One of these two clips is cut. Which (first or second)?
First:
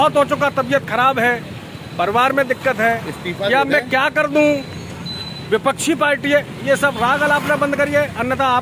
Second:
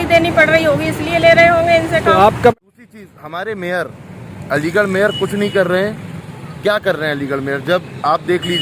second